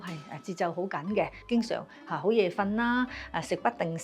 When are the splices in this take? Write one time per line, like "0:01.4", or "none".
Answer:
0:01.4